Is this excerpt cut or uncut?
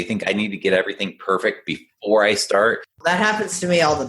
cut